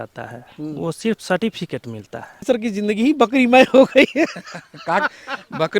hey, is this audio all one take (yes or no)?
no